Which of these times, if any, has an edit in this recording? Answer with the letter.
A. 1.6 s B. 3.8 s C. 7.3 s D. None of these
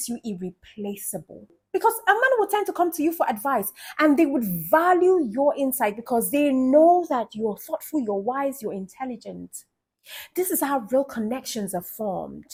D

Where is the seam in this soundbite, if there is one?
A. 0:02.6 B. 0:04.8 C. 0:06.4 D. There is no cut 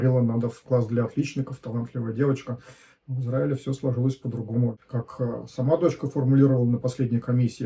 B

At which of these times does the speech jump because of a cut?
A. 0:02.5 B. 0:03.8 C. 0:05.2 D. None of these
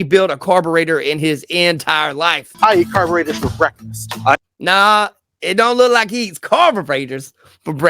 A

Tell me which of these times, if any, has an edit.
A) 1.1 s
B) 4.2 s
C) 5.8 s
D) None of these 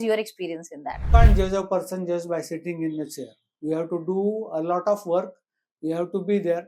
A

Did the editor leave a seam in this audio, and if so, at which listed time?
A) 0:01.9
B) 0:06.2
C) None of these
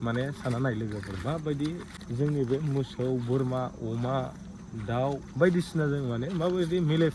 A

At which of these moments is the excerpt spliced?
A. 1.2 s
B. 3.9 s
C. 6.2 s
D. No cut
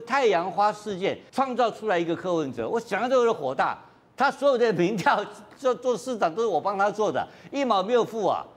A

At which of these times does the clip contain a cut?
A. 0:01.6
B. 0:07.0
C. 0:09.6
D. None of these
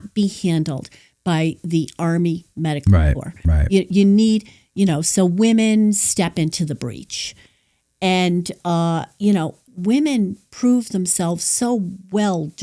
C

